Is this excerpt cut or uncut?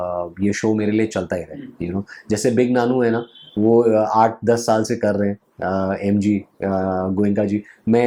uncut